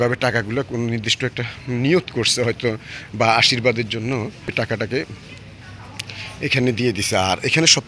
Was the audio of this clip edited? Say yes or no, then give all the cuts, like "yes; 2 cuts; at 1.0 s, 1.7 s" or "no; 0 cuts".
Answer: no; 0 cuts